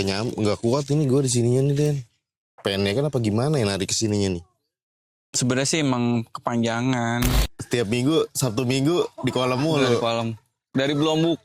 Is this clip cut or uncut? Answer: cut